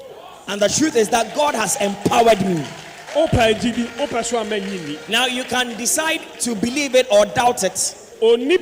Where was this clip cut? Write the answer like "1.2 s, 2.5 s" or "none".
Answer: none